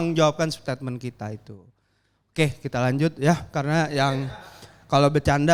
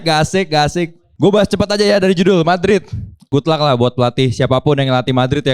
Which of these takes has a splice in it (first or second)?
second